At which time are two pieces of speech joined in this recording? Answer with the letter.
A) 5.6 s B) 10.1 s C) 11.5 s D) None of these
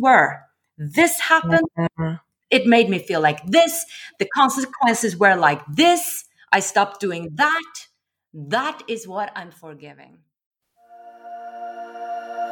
B